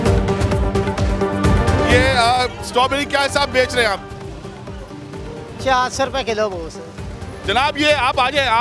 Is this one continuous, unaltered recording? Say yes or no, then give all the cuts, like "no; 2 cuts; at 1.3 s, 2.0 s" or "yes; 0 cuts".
yes; 0 cuts